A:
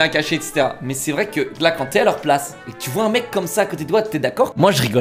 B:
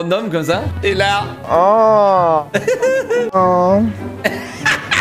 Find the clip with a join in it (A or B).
B